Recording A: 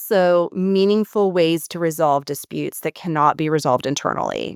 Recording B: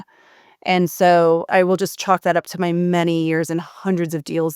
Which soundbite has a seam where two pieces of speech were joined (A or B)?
B